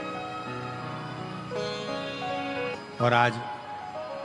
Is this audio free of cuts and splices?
no; 1 cut; at 2.7 s

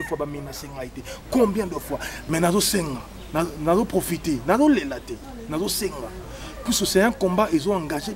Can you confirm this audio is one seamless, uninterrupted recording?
no; 1 cut; at 2.1 s

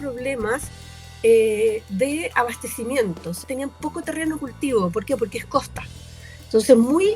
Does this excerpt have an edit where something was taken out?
yes; 1 cut; at 3.4 s

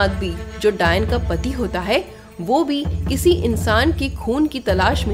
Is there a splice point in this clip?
no; 0 cuts

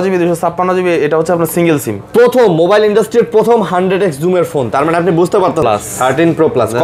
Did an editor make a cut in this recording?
yes; 2 cuts; at 2.0 s, 5.6 s

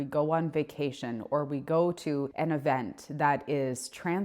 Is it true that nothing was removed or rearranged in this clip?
no; 1 cut; at 2.3 s

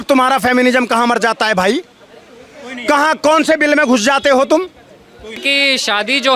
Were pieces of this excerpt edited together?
yes; 1 cut; at 5.4 s

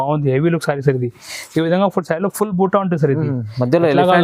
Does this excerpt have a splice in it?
no; 0 cuts

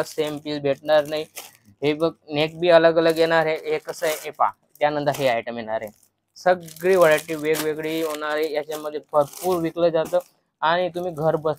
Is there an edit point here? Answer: no; 0 cuts

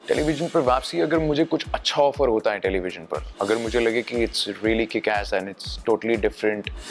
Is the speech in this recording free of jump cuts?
yes; 0 cuts

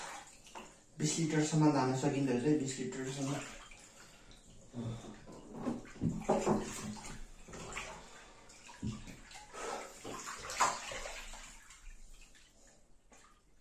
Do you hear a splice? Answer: yes; 1 cut; at 9.6 s

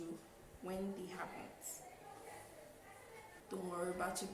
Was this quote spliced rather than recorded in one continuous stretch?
yes; 1 cut; at 3.4 s

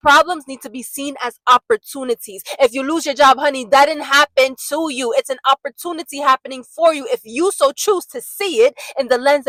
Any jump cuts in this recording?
no; 0 cuts

